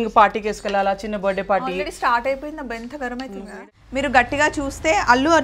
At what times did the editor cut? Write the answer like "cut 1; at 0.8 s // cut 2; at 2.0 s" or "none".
cut 1; at 3.6 s